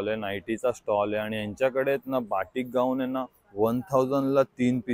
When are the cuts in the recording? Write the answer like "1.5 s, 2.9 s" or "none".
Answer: none

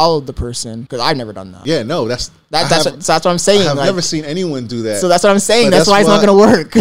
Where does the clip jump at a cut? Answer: 0.8 s, 1.6 s

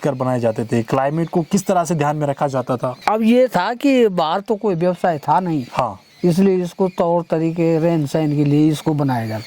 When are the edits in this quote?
3.0 s

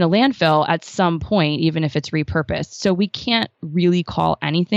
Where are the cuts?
none

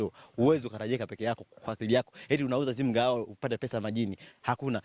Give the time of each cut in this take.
none

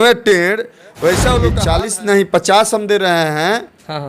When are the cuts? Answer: 1.6 s

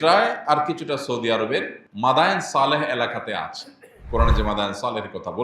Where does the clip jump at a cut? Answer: 1.8 s

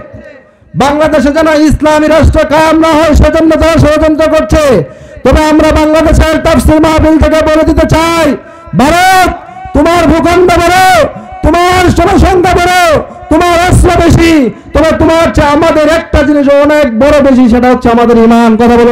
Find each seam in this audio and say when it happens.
none

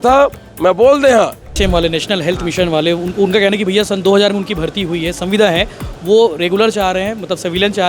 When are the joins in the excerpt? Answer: 1.5 s

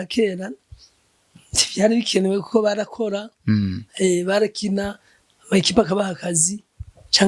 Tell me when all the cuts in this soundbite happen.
none

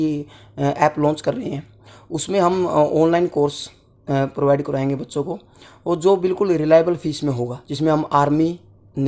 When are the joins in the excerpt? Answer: none

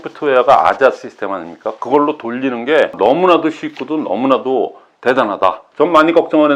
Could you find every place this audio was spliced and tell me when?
2.9 s, 5.6 s

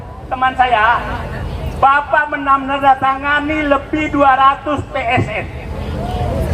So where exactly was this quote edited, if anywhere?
none

